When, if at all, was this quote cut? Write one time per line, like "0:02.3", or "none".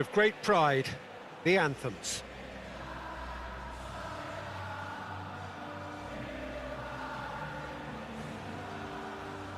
0:01.9